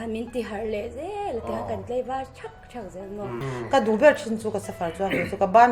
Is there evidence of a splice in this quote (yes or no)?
yes